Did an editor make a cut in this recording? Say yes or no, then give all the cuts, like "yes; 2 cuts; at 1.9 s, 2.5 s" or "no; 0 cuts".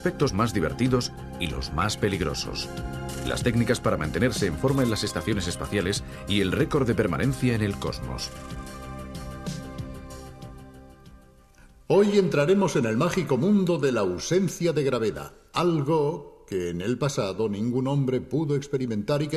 yes; 1 cut; at 6.4 s